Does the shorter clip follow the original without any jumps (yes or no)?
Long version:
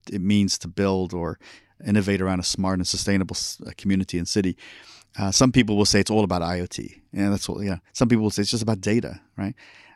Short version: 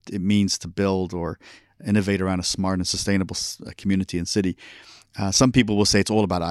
yes